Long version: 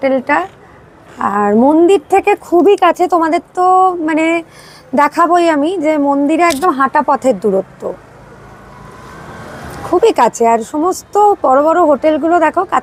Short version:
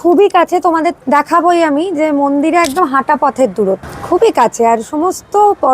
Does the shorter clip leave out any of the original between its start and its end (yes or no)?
yes